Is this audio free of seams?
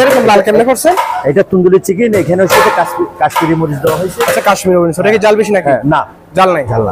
yes; 0 cuts

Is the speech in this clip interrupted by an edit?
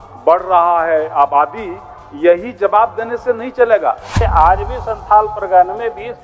yes; 1 cut; at 4.1 s

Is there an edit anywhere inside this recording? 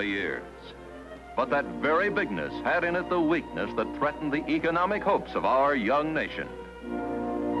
yes; 1 cut; at 6.3 s

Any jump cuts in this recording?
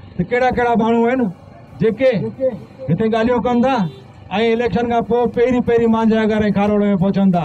no; 0 cuts

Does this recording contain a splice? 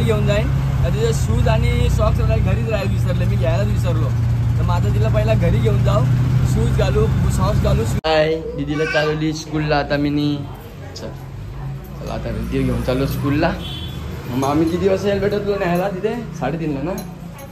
yes; 1 cut; at 8.0 s

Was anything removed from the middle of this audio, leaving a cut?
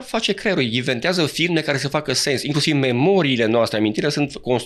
no; 0 cuts

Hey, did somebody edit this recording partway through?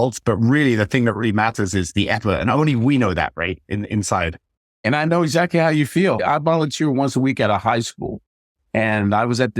yes; 2 cuts; at 4.8 s, 6.2 s

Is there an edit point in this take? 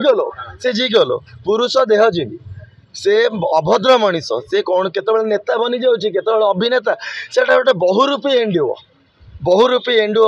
no; 0 cuts

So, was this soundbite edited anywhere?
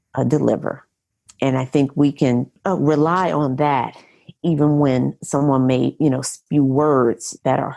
yes; 1 cut; at 2.5 s

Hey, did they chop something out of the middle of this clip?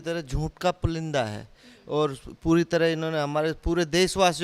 no; 0 cuts

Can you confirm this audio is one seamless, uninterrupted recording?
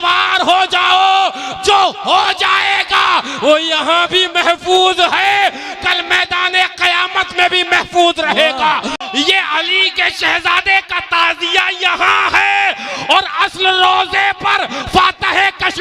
no; 1 cut; at 9.0 s

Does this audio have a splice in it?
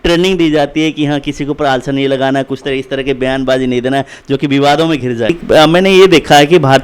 yes; 1 cut; at 5.3 s

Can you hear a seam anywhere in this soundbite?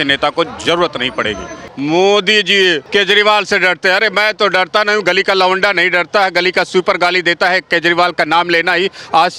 yes; 2 cuts; at 1.5 s, 2.8 s

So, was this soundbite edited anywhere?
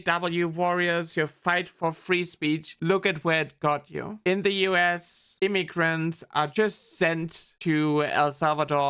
yes; 2 cuts; at 1.7 s, 2.7 s

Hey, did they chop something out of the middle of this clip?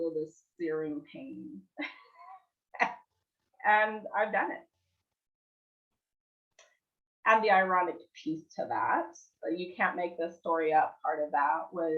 no; 0 cuts

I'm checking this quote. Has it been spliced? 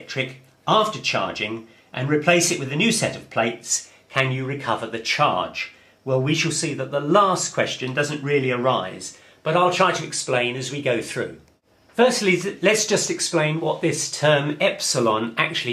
no; 0 cuts

